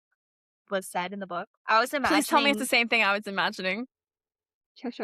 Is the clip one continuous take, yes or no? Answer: no